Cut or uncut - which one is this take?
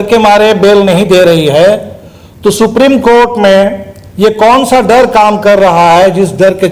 uncut